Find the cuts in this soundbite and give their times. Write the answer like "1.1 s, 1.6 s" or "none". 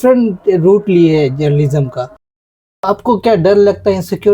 2.4 s